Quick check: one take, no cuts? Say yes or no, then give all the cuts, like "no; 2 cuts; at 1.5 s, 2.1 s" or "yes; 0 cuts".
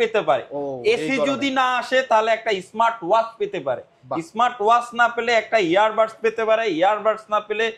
yes; 0 cuts